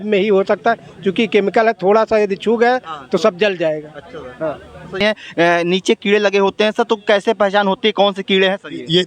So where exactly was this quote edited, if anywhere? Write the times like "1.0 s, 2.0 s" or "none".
5.0 s